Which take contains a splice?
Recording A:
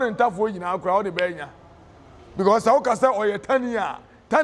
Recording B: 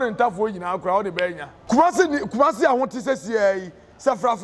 B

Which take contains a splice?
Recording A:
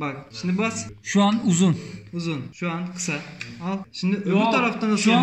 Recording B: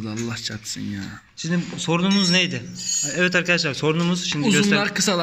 A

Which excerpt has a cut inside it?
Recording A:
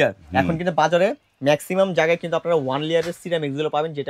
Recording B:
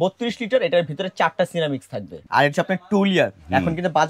B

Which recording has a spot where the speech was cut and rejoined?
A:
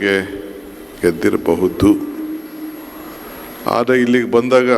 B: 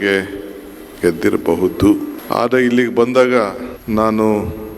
B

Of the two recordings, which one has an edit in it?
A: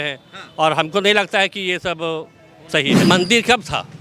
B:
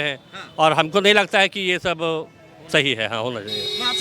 A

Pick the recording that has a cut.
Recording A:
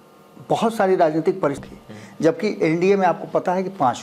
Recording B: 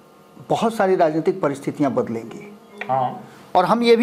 A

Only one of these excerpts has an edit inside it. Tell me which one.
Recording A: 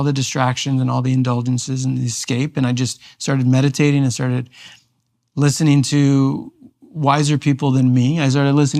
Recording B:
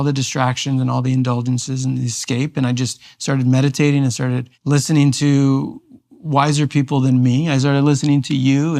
B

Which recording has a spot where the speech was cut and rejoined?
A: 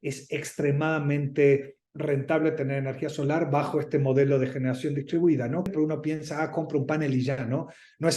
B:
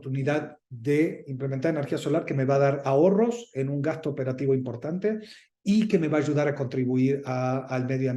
A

